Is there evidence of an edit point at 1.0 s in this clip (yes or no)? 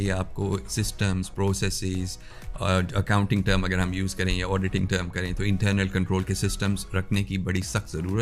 no